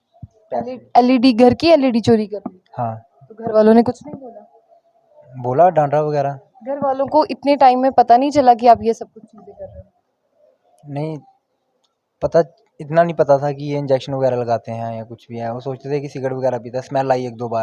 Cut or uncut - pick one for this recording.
uncut